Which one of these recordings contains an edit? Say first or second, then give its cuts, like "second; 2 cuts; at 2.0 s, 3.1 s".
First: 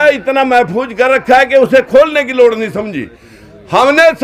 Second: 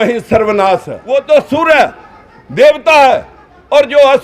second; 1 cut; at 0.9 s